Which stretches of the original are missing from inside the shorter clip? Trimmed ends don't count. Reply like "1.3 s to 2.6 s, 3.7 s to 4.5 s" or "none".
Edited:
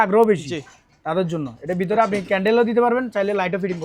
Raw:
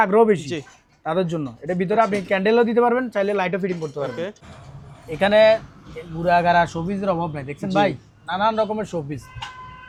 none